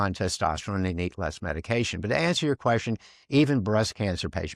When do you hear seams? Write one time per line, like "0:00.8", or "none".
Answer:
none